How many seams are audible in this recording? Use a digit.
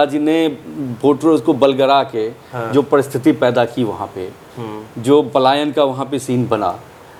0